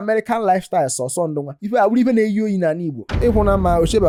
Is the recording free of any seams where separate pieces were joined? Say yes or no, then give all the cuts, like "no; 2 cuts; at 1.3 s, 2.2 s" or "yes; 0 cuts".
yes; 0 cuts